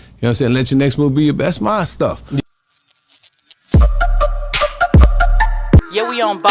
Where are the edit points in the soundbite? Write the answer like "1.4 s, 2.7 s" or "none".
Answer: 2.4 s